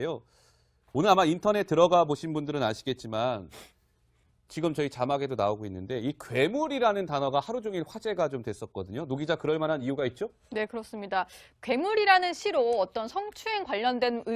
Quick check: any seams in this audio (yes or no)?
no